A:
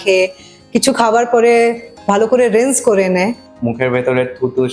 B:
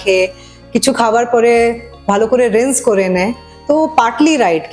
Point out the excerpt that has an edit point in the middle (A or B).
A